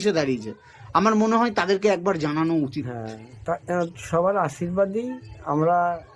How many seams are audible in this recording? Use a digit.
0